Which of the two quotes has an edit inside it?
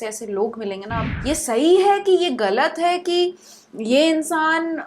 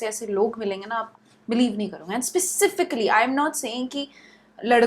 first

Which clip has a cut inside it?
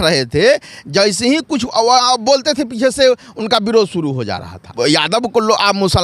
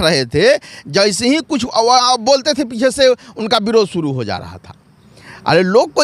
first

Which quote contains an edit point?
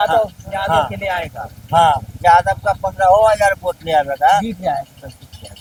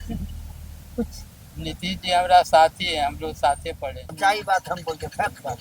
second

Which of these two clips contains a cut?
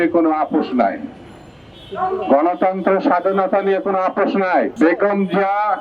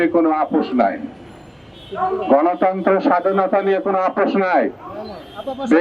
first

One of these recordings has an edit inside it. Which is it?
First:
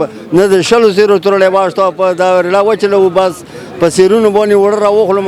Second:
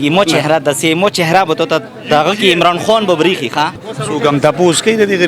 second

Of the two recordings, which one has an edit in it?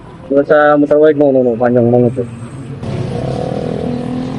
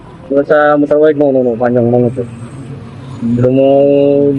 first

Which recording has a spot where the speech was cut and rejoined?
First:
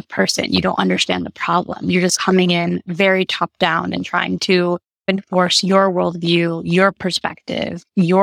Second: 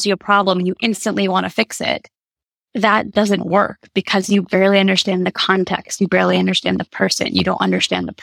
first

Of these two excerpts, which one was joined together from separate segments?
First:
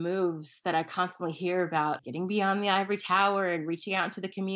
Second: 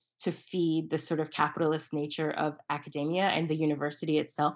first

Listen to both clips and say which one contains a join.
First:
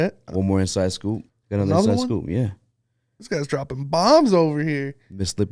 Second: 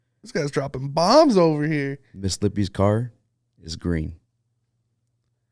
first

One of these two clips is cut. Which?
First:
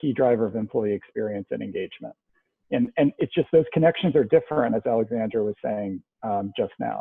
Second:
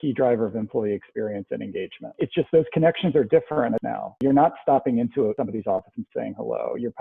second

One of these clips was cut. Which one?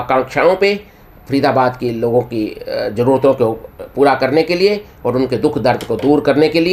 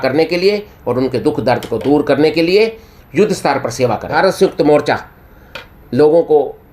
second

